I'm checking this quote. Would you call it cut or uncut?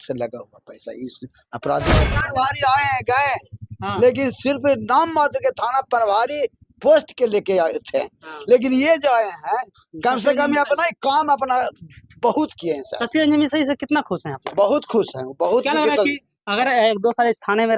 cut